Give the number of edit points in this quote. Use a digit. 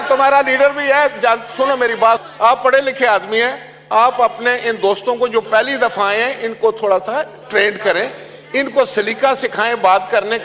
1